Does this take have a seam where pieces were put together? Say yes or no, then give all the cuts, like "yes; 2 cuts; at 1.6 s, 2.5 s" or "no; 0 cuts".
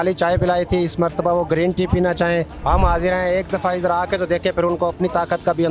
yes; 1 cut; at 2.5 s